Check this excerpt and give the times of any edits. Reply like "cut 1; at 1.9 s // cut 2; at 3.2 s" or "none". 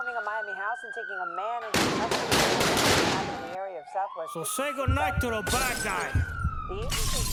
none